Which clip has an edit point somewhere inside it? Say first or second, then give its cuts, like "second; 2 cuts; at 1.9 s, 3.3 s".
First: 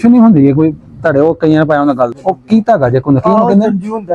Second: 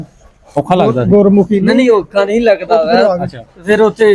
first; 1 cut; at 2.2 s